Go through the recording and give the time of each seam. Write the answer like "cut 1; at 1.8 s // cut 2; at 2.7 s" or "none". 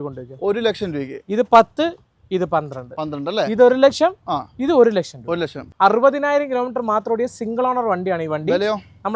cut 1; at 5.7 s